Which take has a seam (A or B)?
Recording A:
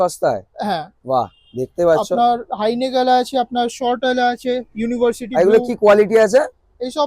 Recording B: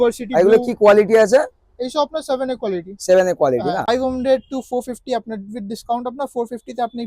B